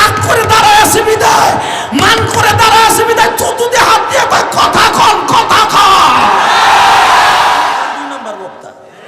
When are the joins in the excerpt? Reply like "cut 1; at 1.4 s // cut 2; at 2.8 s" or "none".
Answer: cut 1; at 8.0 s